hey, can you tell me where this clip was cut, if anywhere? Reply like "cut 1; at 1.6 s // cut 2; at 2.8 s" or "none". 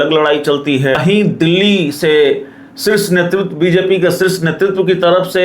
cut 1; at 1.3 s